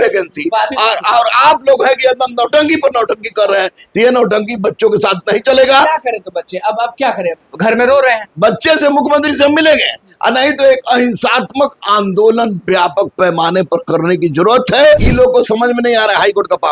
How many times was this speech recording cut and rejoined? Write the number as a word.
one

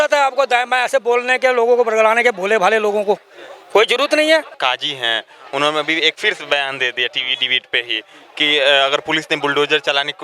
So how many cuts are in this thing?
one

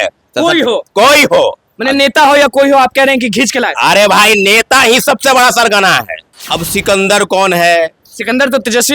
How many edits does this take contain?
one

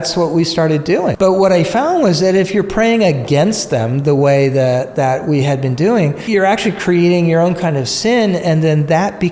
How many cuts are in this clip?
two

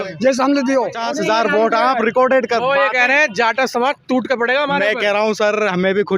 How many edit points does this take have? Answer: one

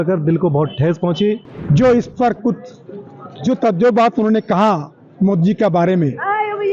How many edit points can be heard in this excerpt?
one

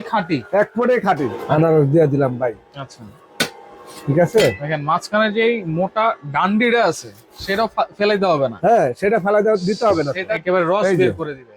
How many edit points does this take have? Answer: two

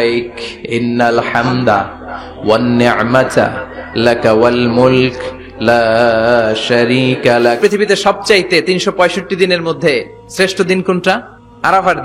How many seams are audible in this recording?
one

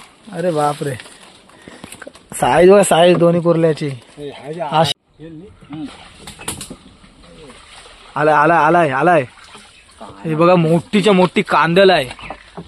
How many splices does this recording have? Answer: one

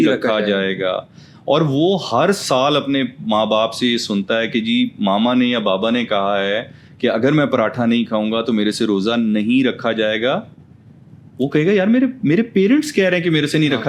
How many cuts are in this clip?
zero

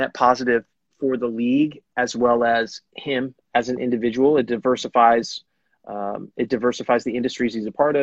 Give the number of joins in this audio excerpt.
two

